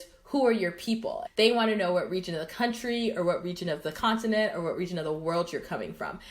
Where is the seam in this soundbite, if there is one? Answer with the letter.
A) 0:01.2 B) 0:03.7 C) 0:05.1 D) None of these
A